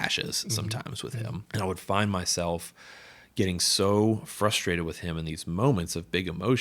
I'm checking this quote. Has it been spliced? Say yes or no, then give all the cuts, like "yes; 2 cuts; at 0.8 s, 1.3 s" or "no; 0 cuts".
yes; 1 cut; at 1.5 s